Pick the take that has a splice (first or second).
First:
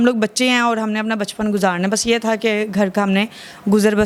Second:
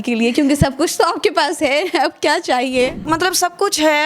second